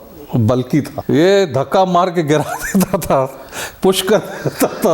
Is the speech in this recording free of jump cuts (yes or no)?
no